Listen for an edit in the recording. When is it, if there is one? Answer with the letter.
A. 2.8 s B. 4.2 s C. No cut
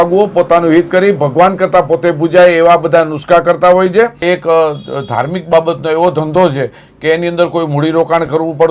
B